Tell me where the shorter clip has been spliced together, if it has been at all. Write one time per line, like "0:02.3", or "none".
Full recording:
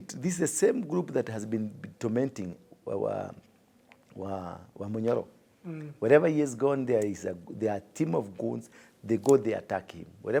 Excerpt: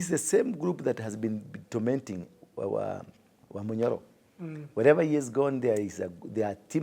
0:03.4